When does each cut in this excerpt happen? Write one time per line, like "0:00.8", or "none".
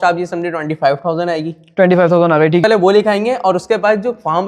0:02.6